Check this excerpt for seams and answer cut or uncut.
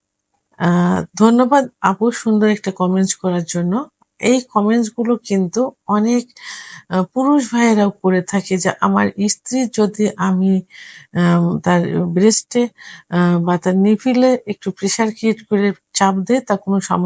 uncut